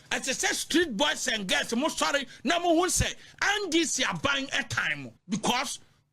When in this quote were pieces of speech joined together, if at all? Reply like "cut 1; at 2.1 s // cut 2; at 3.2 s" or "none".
cut 1; at 5.1 s